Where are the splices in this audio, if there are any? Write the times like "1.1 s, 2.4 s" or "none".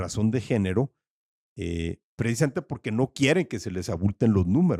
none

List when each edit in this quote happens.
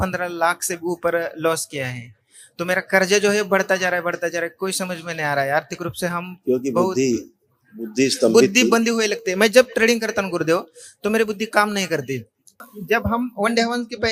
12.7 s

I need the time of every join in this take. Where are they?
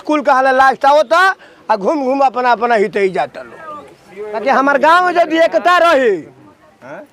none

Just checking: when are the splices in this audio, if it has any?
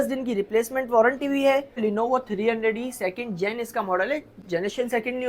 1.8 s

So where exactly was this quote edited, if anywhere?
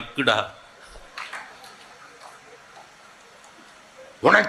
none

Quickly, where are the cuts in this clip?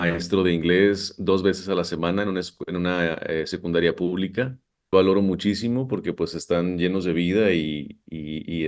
4.9 s

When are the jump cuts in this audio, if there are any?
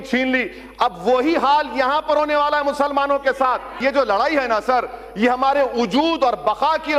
3.8 s

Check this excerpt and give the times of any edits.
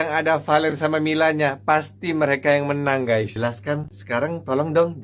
3.3 s

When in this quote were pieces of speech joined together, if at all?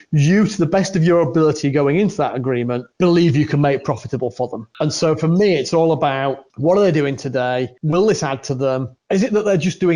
2.9 s, 4.6 s, 6.5 s, 7.8 s, 8.9 s

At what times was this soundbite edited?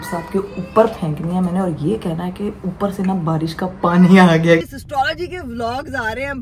4.6 s

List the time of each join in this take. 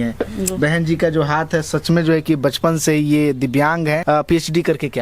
4.0 s

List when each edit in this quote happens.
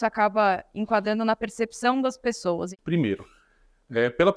2.7 s

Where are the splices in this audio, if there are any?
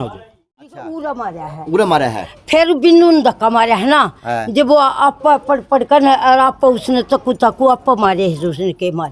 0.9 s

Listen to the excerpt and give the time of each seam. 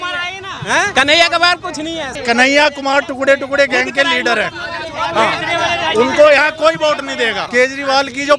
0.9 s, 2.2 s, 7.4 s

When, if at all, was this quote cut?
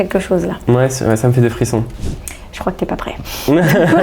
1.9 s

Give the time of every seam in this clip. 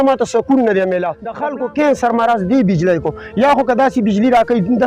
1.3 s

